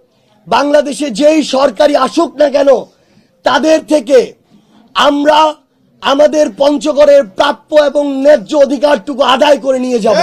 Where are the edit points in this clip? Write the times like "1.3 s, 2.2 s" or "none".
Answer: none